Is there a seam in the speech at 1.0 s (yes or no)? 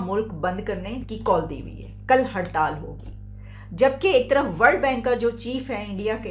yes